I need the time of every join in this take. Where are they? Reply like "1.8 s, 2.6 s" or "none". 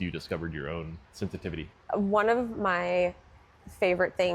1.4 s

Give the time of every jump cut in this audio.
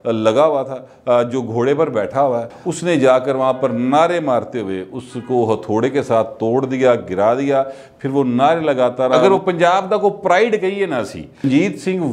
2.6 s, 9.2 s, 11.4 s

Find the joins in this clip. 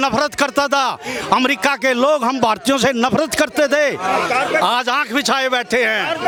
none

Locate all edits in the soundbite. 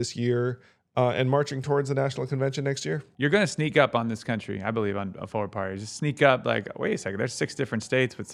3.1 s

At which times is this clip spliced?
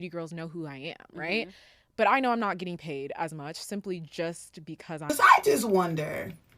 5.0 s

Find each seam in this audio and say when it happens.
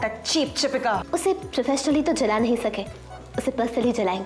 1.0 s

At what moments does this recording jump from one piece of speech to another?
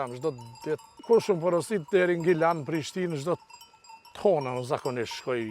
0.9 s

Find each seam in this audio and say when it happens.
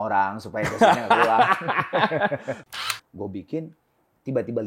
2.6 s

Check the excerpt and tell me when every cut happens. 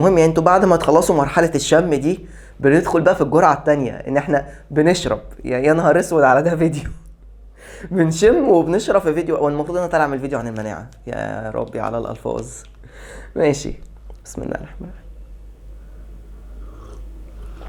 none

